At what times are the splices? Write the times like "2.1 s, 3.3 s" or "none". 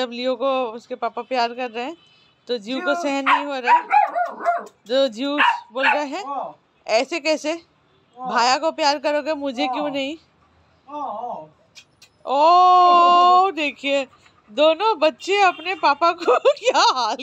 none